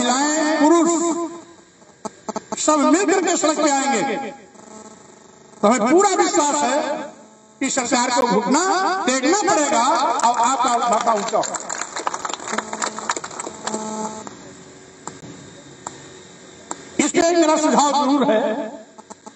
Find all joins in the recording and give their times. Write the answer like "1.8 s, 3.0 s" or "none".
none